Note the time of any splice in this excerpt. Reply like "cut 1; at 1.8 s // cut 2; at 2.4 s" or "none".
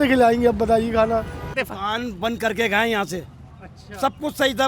cut 1; at 1.5 s